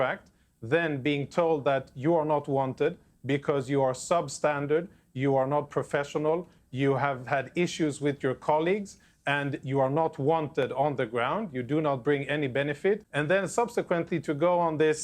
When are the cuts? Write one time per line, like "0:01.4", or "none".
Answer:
0:13.1

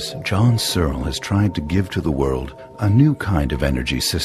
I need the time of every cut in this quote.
0:03.3

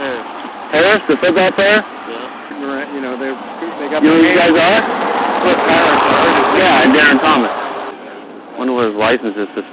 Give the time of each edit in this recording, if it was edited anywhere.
0:02.4
0:07.9

